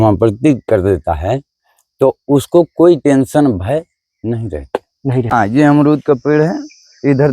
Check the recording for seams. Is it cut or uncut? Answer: cut